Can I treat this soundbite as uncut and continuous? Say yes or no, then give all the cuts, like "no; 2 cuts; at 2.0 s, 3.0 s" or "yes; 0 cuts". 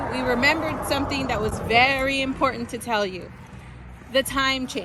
yes; 0 cuts